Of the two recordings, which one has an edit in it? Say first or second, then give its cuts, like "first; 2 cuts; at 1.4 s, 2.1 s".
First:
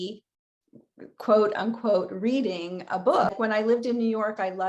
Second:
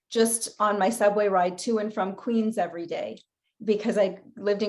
first; 1 cut; at 3.3 s